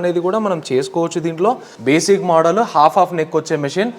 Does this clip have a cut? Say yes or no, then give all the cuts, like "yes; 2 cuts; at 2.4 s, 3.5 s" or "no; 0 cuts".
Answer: yes; 1 cut; at 1.7 s